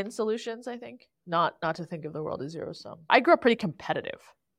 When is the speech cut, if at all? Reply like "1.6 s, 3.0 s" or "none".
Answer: 1.1 s, 3.1 s